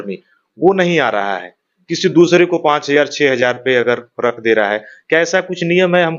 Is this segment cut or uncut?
uncut